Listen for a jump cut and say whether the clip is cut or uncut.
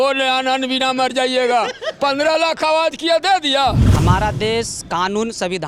cut